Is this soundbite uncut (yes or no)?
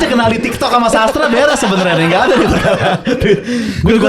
yes